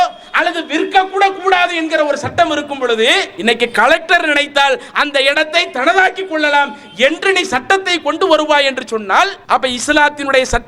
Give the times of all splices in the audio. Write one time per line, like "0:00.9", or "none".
0:03.3
0:09.4